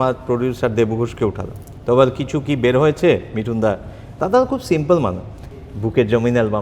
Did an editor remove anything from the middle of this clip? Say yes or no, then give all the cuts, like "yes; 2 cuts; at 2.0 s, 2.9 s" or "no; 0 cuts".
no; 0 cuts